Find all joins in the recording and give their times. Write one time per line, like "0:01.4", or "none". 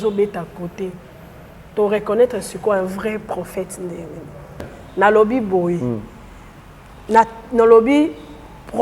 0:04.7